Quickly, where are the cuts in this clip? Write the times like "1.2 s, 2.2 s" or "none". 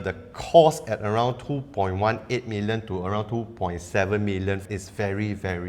4.7 s